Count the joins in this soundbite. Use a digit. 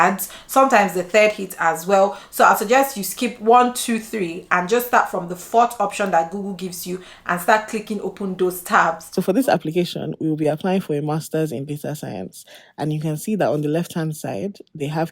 1